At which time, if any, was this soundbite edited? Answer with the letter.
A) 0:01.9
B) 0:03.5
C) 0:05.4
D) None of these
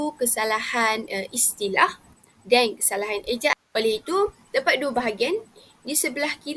B